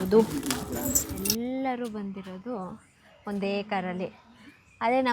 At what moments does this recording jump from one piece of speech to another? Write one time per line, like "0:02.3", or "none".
0:01.1